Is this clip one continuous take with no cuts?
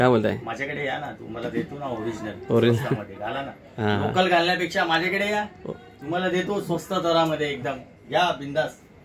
yes; 0 cuts

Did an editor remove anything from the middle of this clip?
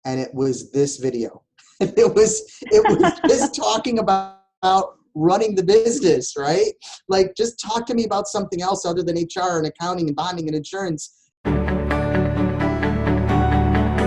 yes; 1 cut; at 11.4 s

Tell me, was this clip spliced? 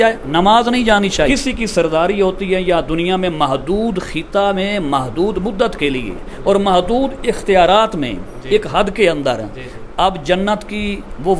yes; 1 cut; at 1.3 s

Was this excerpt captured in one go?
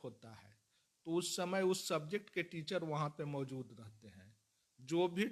yes; 0 cuts

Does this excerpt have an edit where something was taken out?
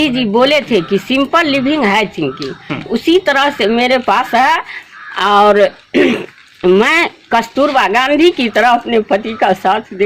no; 0 cuts

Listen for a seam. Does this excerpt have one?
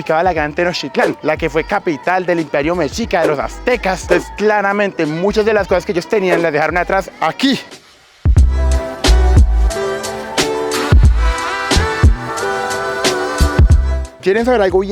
no; 0 cuts

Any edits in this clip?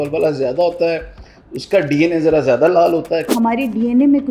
yes; 1 cut; at 3.3 s

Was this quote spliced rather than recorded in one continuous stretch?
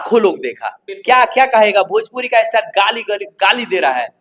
no; 0 cuts

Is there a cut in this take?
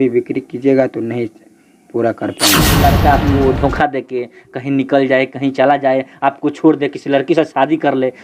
yes; 1 cut; at 2.8 s

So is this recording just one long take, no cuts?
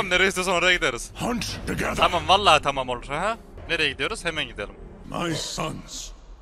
no; 2 cuts; at 3.6 s, 4.9 s

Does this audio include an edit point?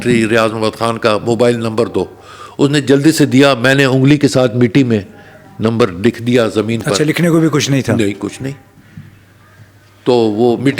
no; 0 cuts

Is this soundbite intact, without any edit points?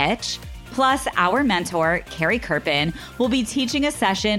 yes; 0 cuts

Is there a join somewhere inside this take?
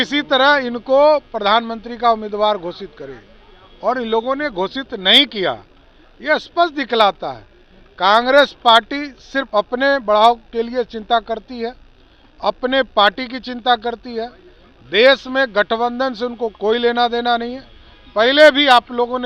no; 0 cuts

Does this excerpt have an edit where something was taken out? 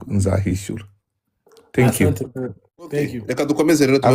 yes; 1 cut; at 3.2 s

